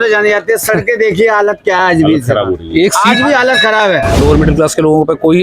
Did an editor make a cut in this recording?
yes; 1 cut; at 4.1 s

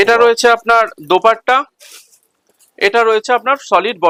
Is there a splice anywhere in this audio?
no; 0 cuts

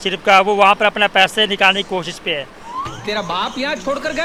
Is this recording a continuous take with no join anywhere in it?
yes; 0 cuts

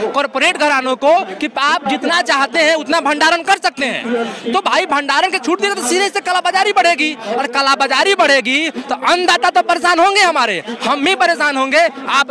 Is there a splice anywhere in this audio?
no; 0 cuts

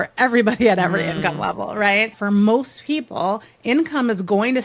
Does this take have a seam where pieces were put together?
yes; 1 cut; at 2.2 s

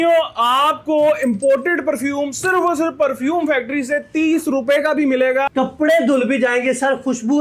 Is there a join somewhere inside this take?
yes; 1 cut; at 5.5 s

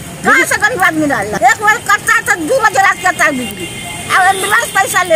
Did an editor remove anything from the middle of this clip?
yes; 1 cut; at 1.3 s

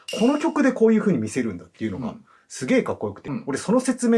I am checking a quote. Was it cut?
yes; 1 cut; at 3.2 s

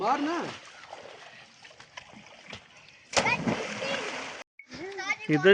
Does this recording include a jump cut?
no; 0 cuts

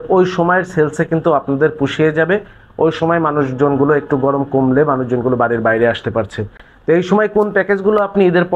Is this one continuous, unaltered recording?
yes; 0 cuts

